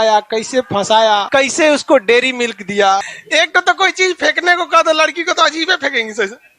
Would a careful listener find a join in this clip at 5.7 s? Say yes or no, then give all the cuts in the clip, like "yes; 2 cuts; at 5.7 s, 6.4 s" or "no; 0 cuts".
no; 2 cuts; at 1.3 s, 3.2 s